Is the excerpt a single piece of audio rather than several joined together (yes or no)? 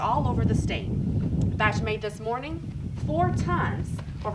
yes